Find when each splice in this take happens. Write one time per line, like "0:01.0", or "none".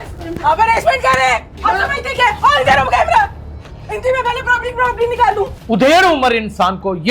0:05.5